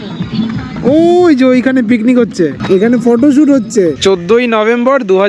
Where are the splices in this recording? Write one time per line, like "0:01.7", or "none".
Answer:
0:04.0